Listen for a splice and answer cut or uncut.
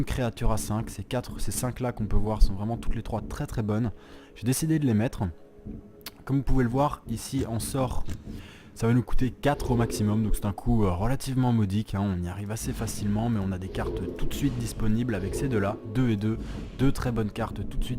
cut